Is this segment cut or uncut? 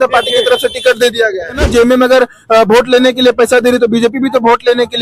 cut